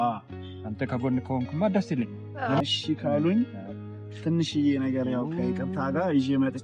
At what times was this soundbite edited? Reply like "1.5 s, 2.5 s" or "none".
2.6 s